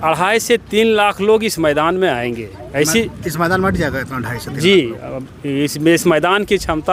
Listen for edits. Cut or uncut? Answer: uncut